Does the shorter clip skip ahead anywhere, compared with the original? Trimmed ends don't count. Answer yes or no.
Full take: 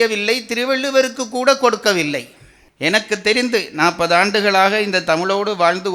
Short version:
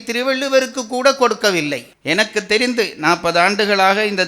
yes